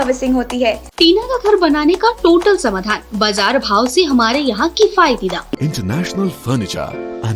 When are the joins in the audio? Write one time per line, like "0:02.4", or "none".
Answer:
0:00.9
0:05.6